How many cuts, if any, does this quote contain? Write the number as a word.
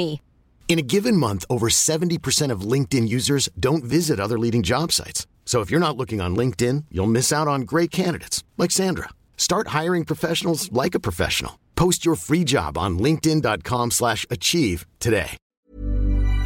one